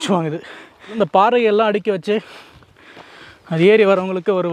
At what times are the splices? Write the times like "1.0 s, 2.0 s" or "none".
1.0 s